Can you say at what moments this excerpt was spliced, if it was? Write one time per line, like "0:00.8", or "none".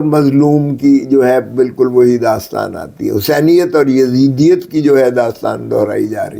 none